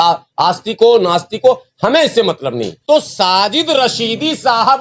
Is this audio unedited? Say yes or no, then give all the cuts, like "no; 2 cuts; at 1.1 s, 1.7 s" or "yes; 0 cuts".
no; 1 cut; at 2.7 s